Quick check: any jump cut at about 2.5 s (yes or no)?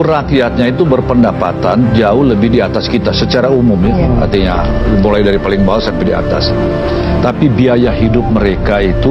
no